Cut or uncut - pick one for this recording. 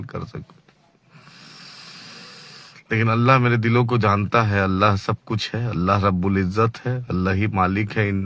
uncut